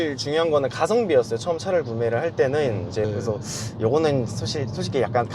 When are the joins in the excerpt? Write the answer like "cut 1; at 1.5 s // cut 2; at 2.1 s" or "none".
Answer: cut 1; at 3.0 s